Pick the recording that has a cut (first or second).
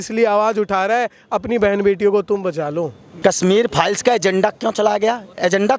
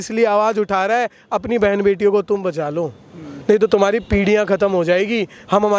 first